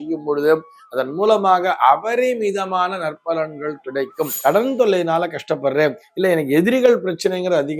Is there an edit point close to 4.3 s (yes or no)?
yes